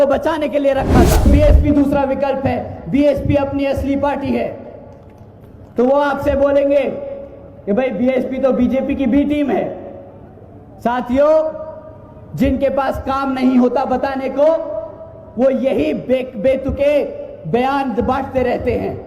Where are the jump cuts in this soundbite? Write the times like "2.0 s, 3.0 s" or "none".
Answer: 1.2 s